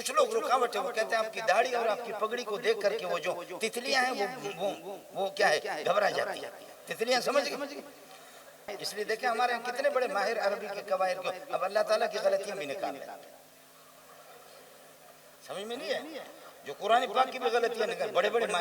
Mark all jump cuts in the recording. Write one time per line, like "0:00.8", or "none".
0:08.7